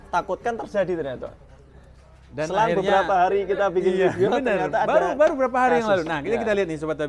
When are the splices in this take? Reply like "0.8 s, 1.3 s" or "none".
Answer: none